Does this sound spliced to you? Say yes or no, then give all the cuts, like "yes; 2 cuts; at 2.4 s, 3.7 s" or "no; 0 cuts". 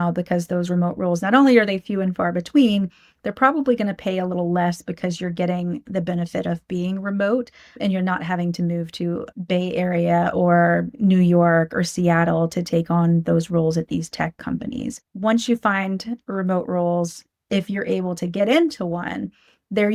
yes; 3 cuts; at 7.7 s, 9.3 s, 15.0 s